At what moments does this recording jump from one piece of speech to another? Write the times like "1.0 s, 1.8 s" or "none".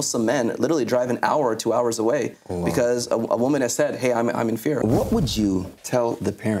4.8 s, 5.8 s